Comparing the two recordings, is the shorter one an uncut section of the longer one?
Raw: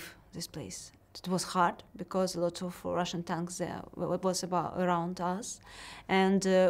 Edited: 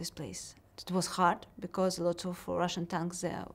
yes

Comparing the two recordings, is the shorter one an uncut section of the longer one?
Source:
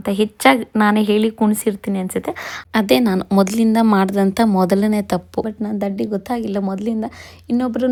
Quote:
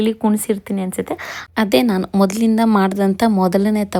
yes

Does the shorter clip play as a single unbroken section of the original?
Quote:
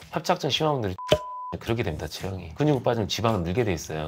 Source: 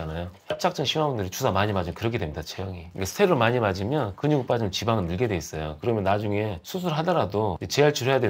no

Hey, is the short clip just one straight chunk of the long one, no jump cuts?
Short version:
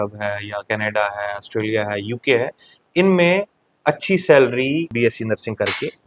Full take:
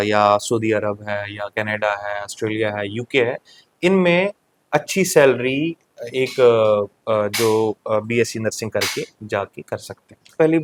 no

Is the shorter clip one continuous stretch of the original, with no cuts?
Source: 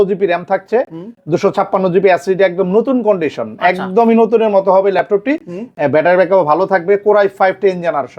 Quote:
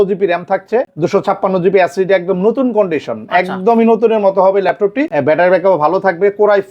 no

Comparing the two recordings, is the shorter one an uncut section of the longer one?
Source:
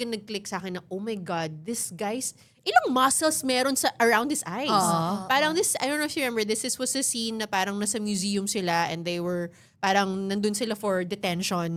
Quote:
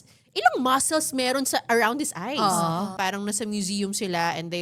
no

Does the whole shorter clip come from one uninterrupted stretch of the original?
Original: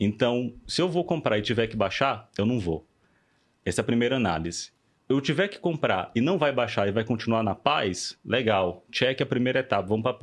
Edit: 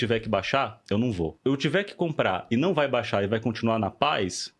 no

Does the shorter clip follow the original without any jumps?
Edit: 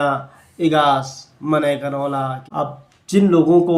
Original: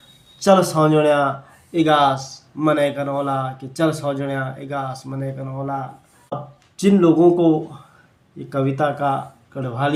no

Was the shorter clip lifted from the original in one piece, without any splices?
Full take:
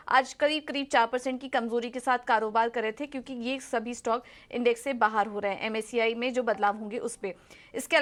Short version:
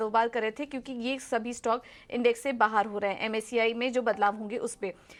yes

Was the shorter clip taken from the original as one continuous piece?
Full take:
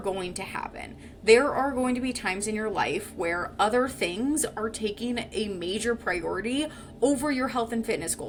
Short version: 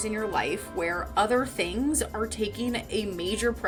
yes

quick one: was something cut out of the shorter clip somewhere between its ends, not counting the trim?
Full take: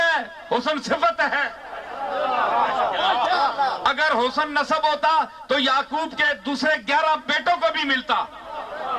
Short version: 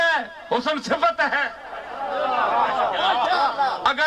no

